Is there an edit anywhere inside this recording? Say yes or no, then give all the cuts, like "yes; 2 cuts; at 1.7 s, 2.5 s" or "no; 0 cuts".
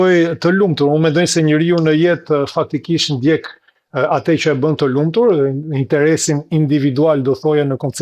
no; 0 cuts